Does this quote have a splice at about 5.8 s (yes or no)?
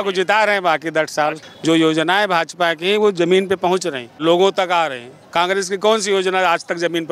no